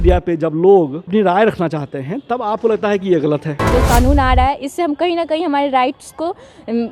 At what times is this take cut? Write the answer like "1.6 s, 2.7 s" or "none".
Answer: 1.1 s, 3.6 s